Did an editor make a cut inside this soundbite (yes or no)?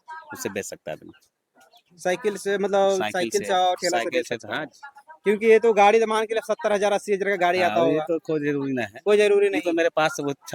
no